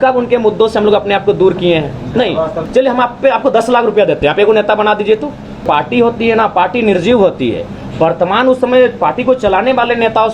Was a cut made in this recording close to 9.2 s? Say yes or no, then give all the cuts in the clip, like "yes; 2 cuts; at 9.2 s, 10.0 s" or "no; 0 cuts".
no; 2 cuts; at 2.6 s, 5.6 s